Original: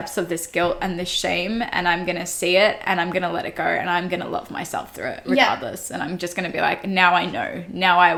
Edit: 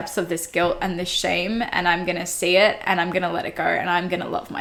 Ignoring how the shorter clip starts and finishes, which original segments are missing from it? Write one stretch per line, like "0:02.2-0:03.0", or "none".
none